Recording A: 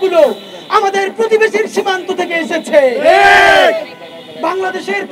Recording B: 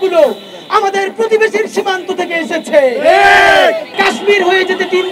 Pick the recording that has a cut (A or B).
B